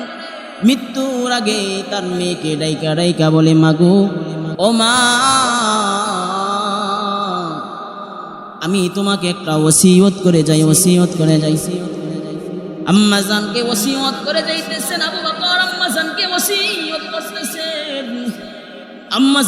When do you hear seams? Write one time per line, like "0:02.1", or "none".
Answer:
0:04.5